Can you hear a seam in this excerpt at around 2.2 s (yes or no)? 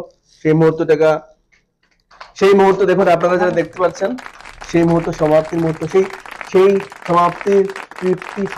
no